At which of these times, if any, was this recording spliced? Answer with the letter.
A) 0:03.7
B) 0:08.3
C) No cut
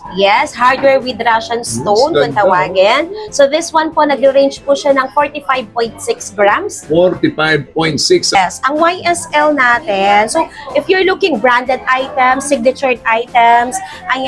B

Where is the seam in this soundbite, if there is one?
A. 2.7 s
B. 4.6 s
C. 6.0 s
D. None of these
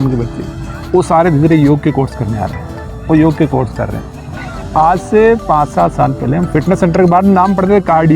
B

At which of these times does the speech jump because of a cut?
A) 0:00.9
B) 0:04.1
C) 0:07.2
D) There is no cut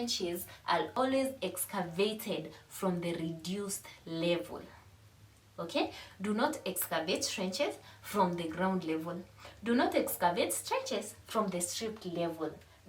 A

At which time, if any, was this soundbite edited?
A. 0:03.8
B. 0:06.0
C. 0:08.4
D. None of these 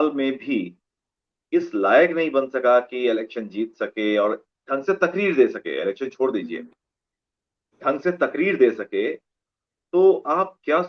D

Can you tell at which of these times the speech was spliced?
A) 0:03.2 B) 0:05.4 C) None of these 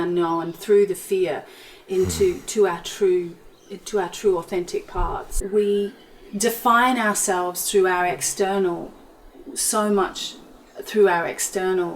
B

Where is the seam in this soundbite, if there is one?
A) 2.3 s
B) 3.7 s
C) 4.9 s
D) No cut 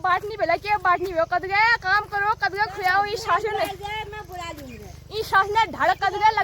D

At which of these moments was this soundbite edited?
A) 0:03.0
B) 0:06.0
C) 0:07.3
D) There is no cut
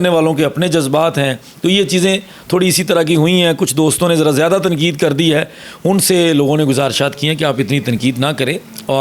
D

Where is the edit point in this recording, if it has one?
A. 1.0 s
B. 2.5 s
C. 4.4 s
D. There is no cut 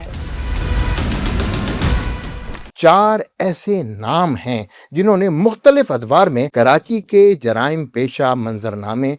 B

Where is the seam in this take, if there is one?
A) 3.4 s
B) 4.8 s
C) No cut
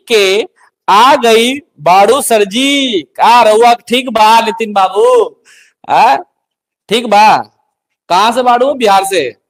C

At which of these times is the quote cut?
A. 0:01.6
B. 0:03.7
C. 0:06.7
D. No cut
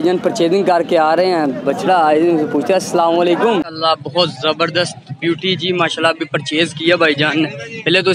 B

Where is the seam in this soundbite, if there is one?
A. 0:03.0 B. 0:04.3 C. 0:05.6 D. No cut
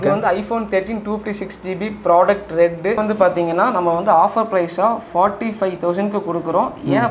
A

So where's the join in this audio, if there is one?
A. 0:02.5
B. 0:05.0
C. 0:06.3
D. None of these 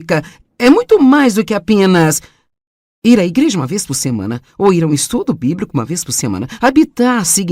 B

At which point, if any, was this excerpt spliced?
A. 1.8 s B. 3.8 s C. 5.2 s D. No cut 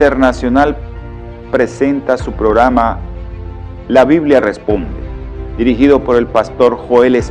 A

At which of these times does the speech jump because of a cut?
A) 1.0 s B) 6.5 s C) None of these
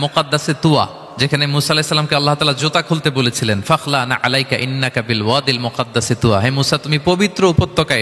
A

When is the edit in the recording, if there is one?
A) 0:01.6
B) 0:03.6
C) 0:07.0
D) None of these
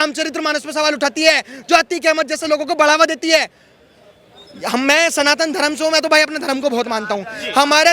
D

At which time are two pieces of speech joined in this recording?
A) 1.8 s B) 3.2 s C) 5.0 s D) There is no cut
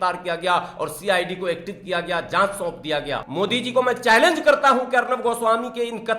B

